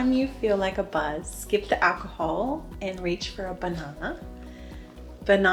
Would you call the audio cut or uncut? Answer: uncut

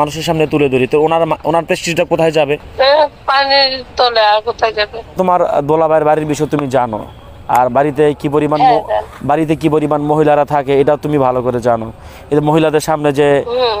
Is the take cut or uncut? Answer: cut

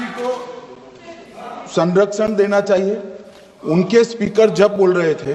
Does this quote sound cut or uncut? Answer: uncut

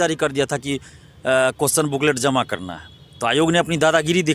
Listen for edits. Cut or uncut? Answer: uncut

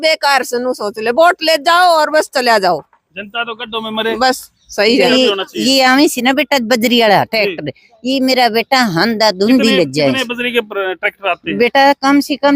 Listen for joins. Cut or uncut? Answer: cut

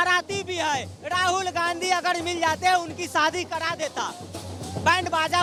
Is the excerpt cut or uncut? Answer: uncut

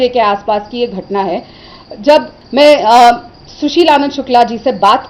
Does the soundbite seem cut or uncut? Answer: cut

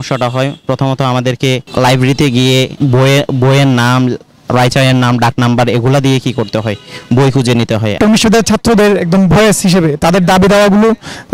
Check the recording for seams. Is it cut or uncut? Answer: cut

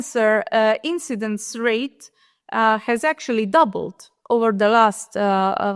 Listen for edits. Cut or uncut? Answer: uncut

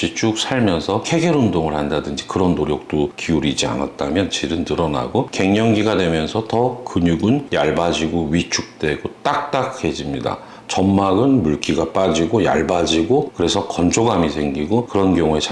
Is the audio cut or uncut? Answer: cut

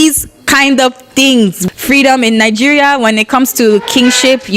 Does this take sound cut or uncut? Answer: cut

